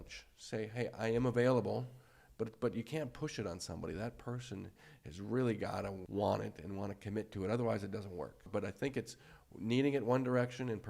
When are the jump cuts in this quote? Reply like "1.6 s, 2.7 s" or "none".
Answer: 6.0 s, 8.5 s